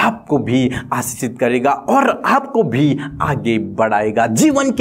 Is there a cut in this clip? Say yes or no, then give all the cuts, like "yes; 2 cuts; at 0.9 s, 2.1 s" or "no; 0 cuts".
no; 0 cuts